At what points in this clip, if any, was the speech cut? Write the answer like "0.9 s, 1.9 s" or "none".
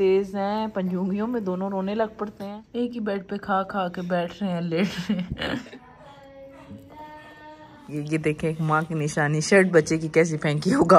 2.8 s, 5.7 s, 7.8 s